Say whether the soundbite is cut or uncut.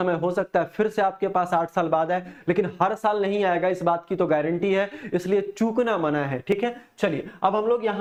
uncut